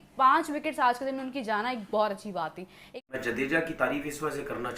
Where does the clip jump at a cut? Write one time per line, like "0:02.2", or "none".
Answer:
0:03.2